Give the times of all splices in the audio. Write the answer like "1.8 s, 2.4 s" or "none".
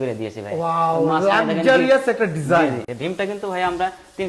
2.9 s